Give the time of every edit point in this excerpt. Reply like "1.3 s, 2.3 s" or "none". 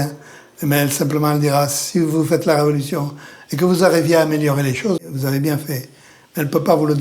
5.0 s